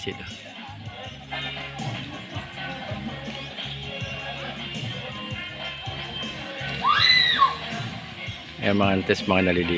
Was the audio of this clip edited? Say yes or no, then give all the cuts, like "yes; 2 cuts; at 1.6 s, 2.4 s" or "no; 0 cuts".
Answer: no; 0 cuts